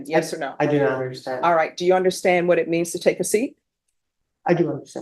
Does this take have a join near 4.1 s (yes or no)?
no